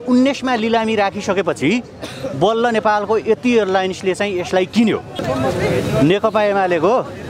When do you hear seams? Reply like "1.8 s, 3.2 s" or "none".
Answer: 5.1 s